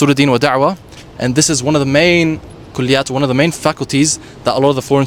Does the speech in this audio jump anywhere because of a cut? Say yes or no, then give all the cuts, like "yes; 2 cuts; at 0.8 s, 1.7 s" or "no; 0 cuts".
no; 0 cuts